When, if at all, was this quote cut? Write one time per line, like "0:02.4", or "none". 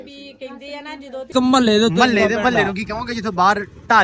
0:01.3